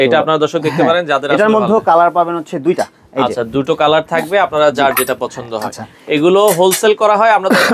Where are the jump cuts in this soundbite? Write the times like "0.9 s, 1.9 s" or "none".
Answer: none